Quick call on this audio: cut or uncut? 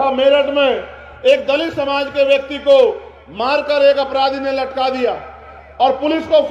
uncut